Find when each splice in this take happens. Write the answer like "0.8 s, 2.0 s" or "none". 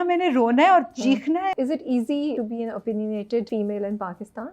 1.5 s, 2.4 s, 3.5 s